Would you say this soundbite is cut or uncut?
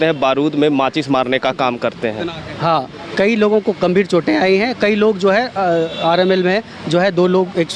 cut